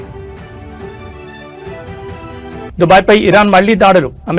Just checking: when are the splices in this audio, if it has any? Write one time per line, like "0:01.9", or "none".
none

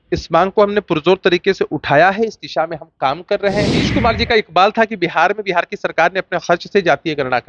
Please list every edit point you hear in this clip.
0:03.9

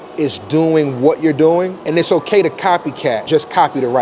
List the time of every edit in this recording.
0:01.8
0:03.2

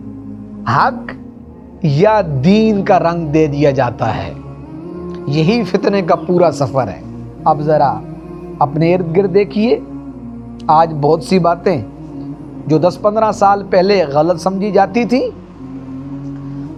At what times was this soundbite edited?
none

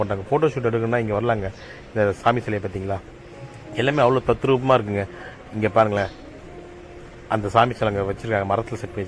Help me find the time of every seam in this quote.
none

